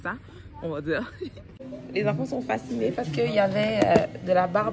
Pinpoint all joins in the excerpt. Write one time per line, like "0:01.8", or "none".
0:01.7

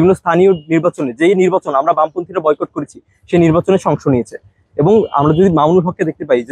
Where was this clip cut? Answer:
none

